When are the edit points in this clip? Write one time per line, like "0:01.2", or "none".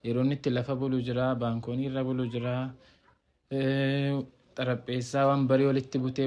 none

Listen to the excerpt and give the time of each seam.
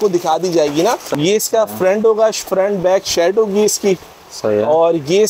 0:01.0

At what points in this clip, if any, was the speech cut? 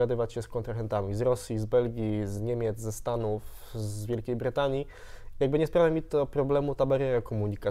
none

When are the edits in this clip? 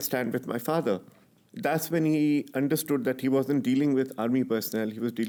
none

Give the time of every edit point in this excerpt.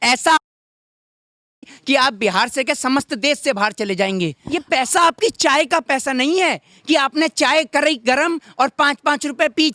0:04.4

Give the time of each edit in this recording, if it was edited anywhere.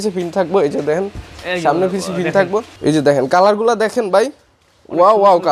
0:02.7

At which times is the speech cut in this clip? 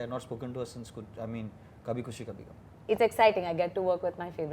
0:02.7

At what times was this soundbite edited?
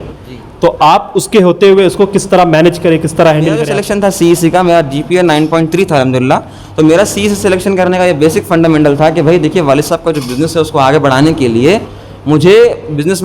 0:03.8

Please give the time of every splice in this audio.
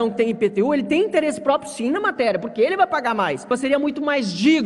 0:03.5

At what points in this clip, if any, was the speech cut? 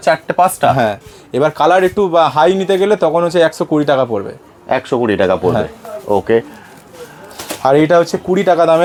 none

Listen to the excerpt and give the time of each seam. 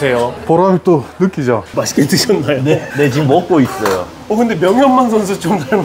0:01.7

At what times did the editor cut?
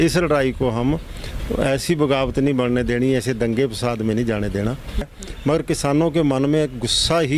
0:05.1

